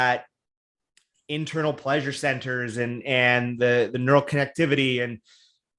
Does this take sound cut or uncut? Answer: uncut